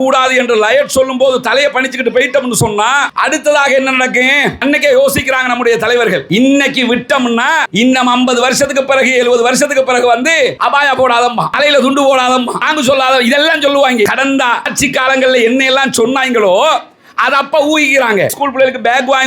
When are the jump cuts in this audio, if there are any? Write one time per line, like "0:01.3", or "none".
0:18.4